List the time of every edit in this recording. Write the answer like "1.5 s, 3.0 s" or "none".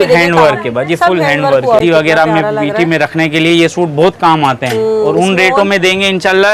1.8 s